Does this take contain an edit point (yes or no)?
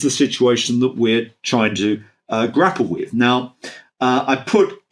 no